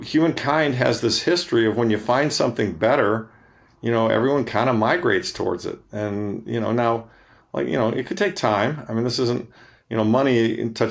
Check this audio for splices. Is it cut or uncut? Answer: uncut